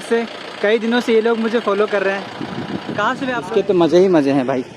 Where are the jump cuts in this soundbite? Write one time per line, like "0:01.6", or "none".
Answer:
0:03.6